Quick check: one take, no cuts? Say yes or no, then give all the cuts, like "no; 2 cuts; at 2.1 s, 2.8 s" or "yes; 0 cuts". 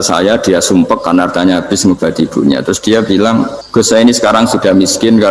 no; 1 cut; at 3.6 s